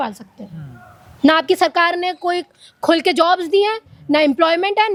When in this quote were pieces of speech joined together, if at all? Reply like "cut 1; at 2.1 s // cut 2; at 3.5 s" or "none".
none